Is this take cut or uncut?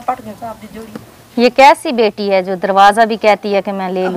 uncut